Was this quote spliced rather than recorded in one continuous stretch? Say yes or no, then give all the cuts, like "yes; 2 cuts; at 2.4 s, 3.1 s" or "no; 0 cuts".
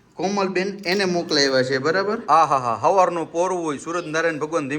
yes; 1 cut; at 2.2 s